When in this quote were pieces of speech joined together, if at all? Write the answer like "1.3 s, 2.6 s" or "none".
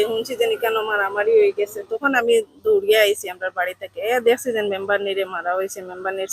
none